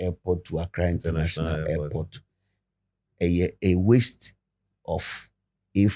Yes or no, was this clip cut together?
no